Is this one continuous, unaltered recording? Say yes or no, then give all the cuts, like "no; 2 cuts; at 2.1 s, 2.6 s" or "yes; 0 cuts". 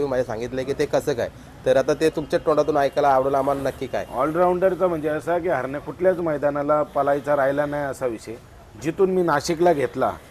yes; 0 cuts